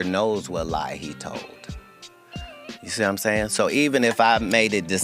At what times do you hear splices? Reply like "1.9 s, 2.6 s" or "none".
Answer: 1.6 s, 2.8 s